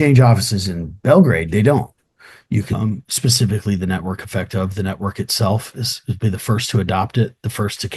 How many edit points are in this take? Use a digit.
1